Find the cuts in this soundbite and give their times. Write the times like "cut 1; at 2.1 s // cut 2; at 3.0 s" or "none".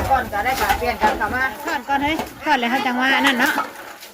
cut 1; at 1.7 s